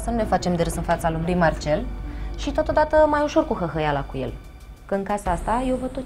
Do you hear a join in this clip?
no; 0 cuts

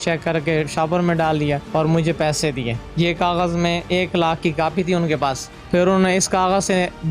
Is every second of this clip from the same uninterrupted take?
no; 3 cuts; at 1.6 s, 2.8 s, 5.5 s

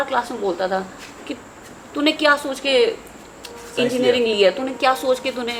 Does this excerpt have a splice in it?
no; 0 cuts

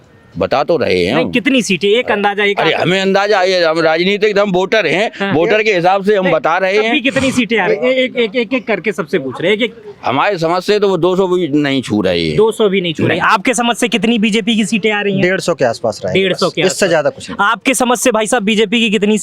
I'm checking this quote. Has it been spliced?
no; 0 cuts

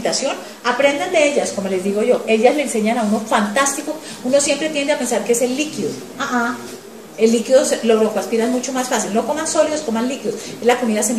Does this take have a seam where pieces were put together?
yes; 1 cut; at 2.4 s

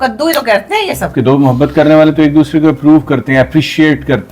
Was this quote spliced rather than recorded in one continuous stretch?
yes; 1 cut; at 1.1 s

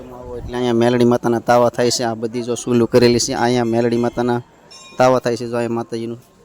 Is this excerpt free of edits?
yes; 0 cuts

